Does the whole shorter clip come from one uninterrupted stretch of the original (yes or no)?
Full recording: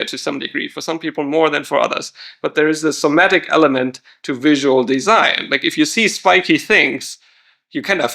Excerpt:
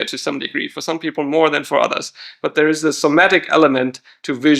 yes